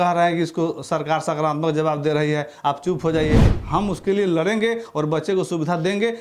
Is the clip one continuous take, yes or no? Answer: no